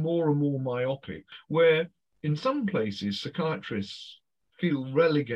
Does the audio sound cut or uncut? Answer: cut